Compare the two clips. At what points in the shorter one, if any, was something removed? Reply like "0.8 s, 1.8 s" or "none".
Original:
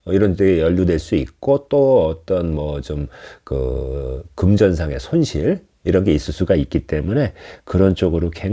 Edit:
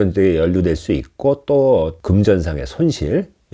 2.0 s